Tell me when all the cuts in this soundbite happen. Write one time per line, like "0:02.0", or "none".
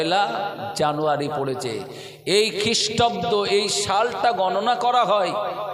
none